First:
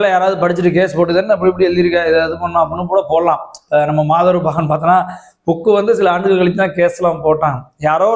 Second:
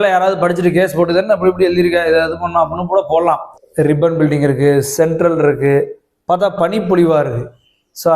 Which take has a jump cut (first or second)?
second